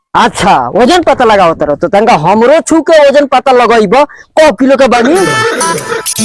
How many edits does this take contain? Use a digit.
0